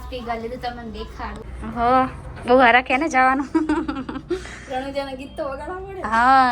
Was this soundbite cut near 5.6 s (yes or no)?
no